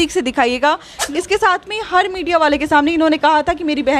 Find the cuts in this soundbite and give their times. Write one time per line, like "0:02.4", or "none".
0:00.9